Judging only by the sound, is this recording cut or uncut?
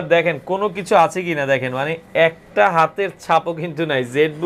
uncut